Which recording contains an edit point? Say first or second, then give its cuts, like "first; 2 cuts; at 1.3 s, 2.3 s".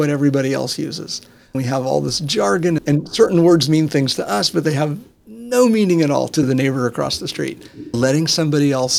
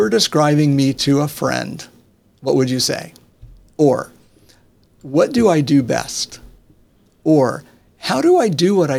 first; 4 cuts; at 1.6 s, 2.8 s, 6.4 s, 7.9 s